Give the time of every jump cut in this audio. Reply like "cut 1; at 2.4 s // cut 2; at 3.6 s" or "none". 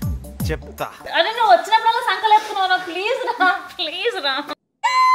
cut 1; at 1.1 s